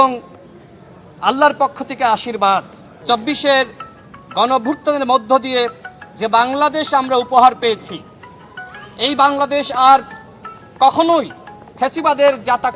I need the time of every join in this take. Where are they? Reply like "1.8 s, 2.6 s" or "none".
2.8 s